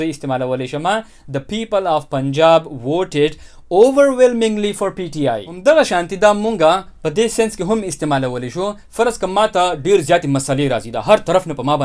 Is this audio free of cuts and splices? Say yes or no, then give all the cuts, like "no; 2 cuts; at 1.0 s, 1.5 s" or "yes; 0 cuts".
no; 1 cut; at 5.5 s